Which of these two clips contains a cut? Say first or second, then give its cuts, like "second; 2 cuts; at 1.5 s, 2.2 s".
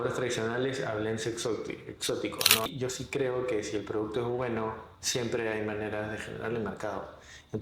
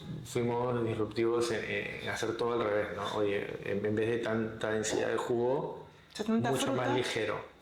first; 1 cut; at 2.7 s